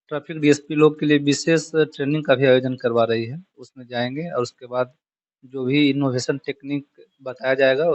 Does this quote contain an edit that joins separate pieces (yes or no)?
no